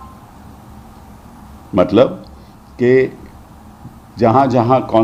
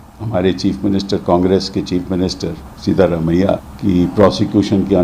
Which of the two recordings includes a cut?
second; 1 cut; at 3.7 s

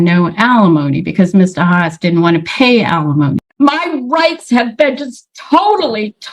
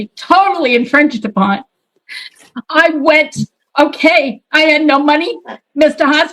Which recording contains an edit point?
first; 1 cut; at 3.5 s

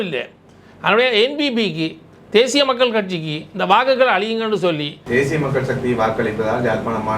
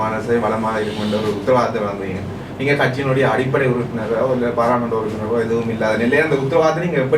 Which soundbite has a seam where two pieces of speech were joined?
first; 1 cut; at 4.9 s

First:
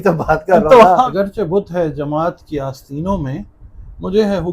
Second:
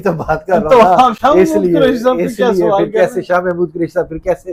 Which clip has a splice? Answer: first; 1 cut; at 1.1 s

